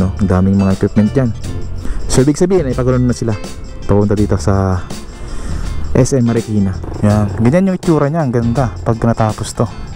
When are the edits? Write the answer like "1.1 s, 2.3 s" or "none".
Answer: 6.8 s